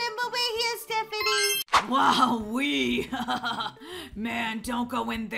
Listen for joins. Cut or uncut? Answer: cut